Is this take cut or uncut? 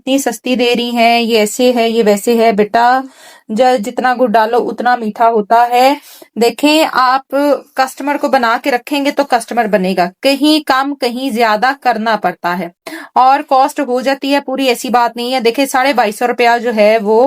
uncut